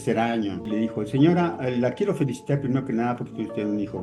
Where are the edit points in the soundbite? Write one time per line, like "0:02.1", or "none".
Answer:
none